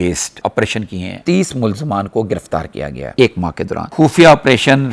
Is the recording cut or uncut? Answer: cut